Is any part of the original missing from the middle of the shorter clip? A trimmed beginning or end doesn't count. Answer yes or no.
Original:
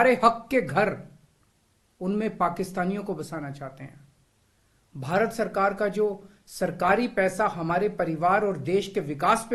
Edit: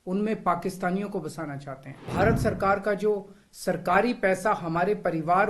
yes